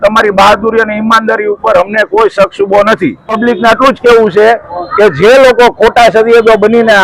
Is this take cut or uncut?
cut